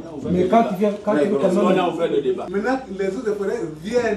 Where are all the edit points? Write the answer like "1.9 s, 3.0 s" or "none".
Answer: 2.4 s

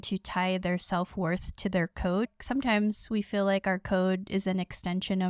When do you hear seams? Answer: 2.3 s

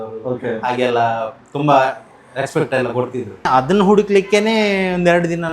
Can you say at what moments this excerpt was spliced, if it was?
3.5 s

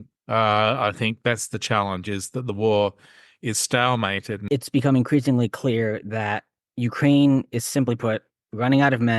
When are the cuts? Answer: 4.4 s

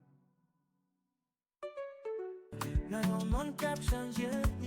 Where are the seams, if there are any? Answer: 2.5 s

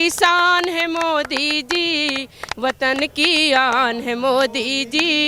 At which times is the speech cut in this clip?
none

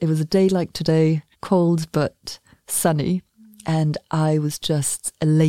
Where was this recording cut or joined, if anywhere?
1.3 s

